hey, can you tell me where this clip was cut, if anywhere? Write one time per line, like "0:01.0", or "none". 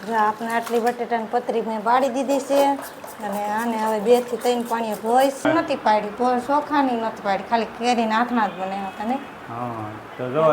0:05.4